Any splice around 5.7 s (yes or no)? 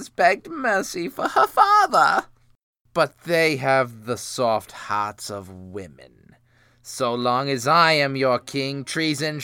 no